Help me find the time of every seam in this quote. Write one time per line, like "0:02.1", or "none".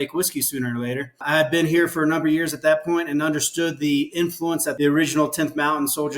0:01.1
0:04.7